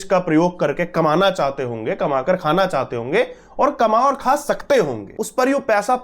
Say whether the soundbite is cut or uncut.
cut